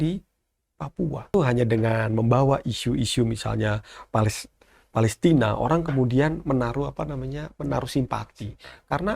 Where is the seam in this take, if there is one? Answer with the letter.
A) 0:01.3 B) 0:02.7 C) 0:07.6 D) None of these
A